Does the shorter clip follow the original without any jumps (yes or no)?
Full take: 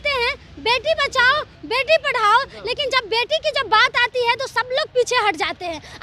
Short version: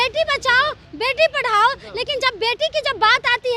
yes